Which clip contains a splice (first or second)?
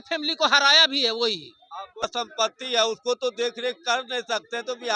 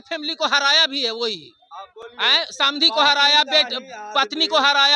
first